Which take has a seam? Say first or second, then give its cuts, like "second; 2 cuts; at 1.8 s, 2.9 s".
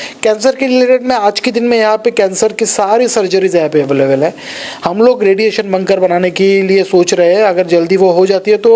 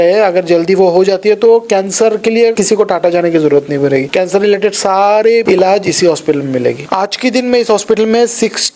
second; 4 cuts; at 2.6 s, 4.1 s, 5.4 s, 6.8 s